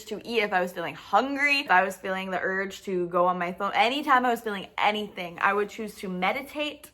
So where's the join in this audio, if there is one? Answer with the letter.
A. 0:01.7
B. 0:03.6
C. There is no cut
A